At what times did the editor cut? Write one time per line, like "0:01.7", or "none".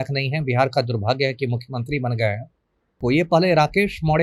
0:03.0